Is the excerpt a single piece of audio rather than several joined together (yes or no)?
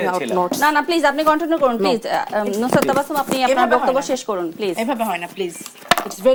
yes